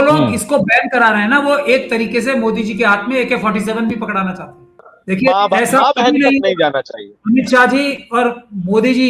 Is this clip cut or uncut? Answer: cut